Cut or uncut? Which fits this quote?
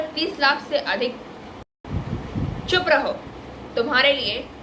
cut